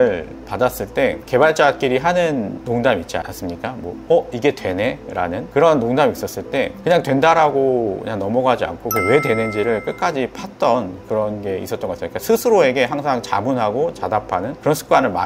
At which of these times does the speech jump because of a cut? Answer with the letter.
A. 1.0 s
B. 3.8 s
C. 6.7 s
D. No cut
D